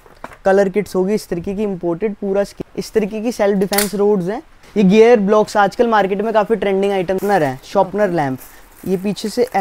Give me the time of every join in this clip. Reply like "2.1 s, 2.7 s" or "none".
2.5 s, 4.6 s, 7.2 s